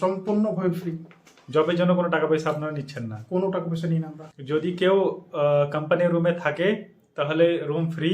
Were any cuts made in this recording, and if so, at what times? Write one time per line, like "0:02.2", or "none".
0:04.2